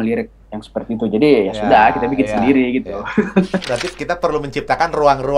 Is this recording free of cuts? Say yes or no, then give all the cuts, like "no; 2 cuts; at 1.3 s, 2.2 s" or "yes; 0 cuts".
no; 1 cut; at 3.7 s